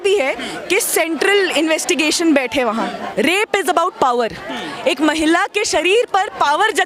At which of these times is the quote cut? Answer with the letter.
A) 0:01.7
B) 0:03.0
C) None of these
B